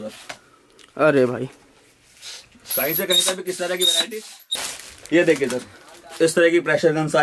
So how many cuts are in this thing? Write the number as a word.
one